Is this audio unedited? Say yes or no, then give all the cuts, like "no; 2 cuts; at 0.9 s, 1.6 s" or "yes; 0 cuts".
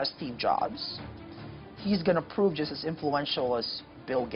yes; 0 cuts